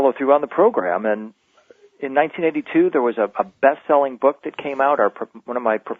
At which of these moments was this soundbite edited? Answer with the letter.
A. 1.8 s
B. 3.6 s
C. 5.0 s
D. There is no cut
A